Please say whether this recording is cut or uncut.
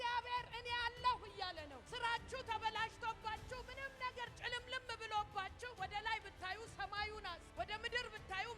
cut